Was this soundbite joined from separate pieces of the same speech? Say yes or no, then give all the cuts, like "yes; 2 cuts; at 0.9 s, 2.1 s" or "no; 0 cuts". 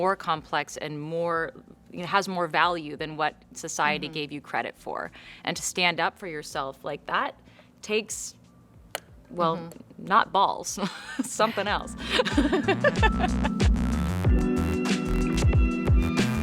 no; 0 cuts